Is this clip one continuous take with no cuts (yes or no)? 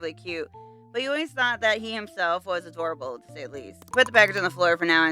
no